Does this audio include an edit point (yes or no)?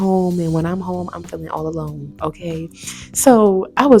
no